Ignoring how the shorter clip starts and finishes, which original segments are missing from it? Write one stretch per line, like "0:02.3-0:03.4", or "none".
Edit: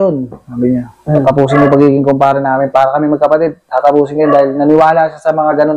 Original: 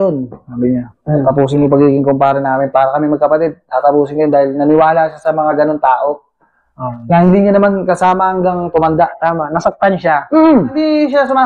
none